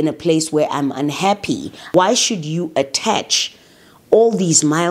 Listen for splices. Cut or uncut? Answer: cut